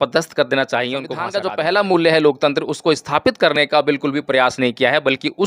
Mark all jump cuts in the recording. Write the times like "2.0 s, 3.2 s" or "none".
1.3 s